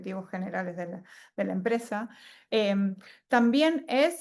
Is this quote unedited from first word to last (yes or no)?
yes